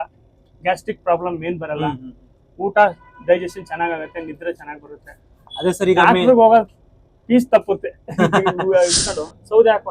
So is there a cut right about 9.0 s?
yes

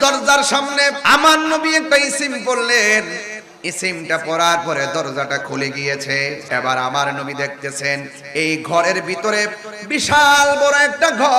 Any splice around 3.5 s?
no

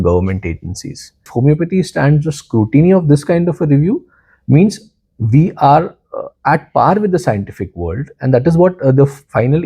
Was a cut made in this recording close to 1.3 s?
yes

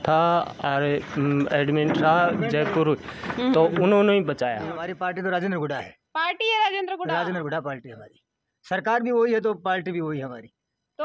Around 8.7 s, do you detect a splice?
no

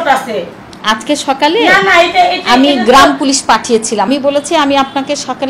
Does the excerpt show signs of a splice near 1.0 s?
no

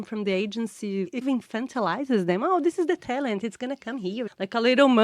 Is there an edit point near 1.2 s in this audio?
yes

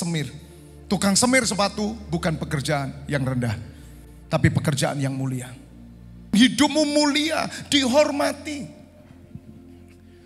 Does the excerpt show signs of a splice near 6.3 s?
yes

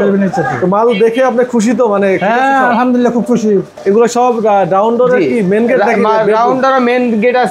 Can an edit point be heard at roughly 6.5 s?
no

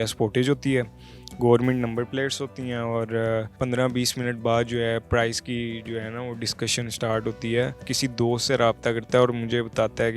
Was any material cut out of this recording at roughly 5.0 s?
no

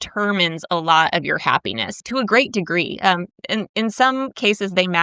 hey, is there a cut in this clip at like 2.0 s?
yes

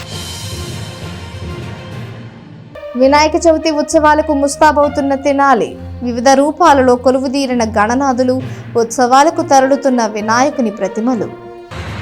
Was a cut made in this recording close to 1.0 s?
no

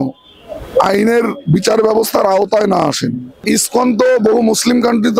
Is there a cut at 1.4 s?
no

